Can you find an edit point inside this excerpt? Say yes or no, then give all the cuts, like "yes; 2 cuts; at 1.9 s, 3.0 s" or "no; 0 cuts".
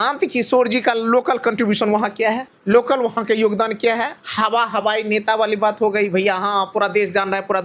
yes; 2 cuts; at 2.5 s, 4.2 s